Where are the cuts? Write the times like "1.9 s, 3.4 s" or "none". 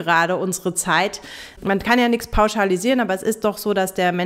1.5 s